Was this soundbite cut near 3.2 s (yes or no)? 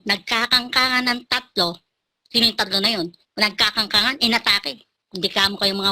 yes